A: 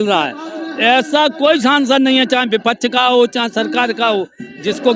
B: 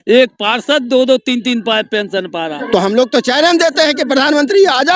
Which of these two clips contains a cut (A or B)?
B